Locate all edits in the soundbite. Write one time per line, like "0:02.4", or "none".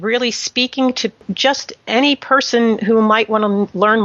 0:01.3